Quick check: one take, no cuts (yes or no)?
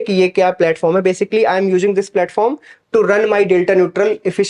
yes